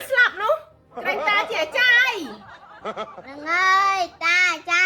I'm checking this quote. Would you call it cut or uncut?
uncut